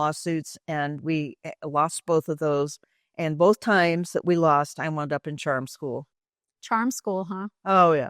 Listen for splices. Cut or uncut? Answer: cut